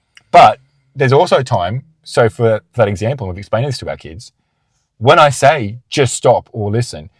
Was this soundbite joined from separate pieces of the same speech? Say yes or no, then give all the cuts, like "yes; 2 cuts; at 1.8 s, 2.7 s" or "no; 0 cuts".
no; 0 cuts